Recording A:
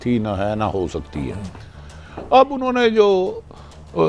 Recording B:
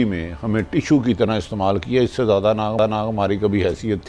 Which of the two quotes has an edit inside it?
B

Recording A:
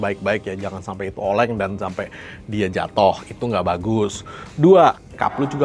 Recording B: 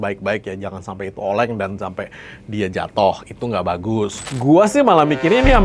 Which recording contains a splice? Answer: B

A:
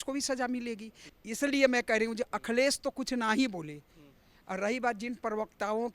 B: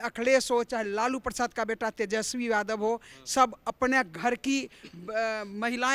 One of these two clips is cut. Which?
A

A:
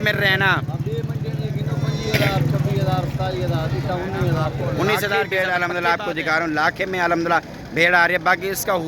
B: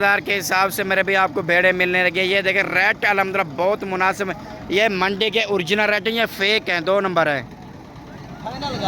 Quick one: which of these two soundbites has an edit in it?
A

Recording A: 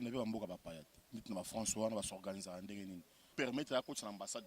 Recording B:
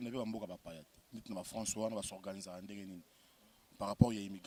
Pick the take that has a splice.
A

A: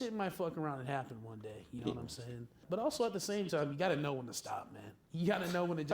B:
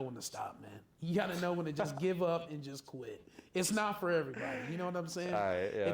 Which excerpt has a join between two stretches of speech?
A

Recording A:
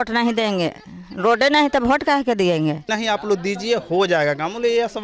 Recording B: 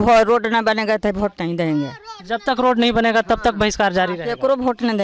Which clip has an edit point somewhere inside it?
A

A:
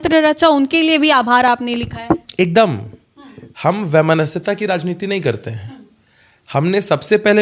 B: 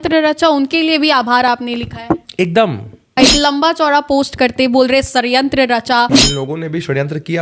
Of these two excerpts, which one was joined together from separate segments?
B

